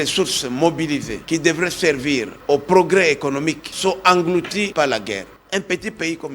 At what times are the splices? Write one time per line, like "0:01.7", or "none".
0:01.2
0:02.3
0:03.7
0:04.7
0:05.3